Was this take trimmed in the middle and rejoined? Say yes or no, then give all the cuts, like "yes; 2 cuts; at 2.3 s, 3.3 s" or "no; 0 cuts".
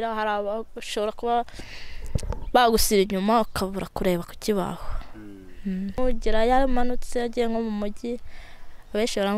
yes; 1 cut; at 6.0 s